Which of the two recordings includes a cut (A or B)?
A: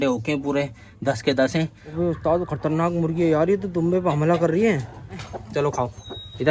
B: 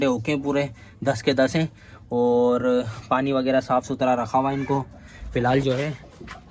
A